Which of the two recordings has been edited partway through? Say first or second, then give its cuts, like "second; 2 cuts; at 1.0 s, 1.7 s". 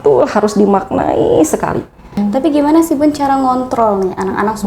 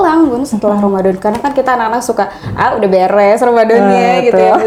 first; 1 cut; at 2.2 s